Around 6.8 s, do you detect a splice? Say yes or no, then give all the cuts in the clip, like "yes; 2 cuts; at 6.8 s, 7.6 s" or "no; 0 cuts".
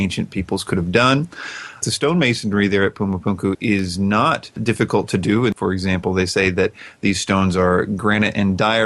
no; 4 cuts; at 1.8 s, 3.6 s, 4.6 s, 5.5 s